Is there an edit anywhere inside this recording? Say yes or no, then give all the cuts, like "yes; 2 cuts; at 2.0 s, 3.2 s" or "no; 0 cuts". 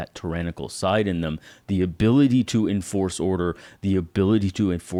no; 0 cuts